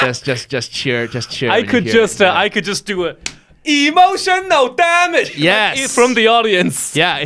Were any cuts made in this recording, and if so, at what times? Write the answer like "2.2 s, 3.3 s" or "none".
none